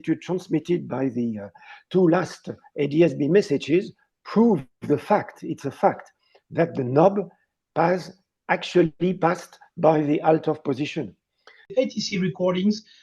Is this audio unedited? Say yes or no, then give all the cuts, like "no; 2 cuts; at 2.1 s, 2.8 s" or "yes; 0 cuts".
no; 1 cut; at 11.7 s